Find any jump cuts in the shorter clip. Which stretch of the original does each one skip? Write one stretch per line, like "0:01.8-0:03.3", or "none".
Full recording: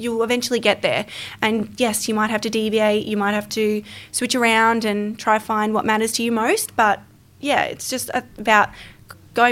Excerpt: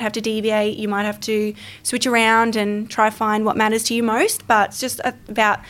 0:07.0-0:07.9